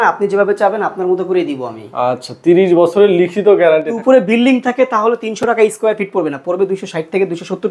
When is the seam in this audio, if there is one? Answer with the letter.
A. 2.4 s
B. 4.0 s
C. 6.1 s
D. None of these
B